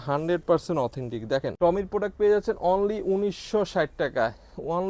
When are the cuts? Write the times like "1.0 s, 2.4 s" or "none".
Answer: 1.5 s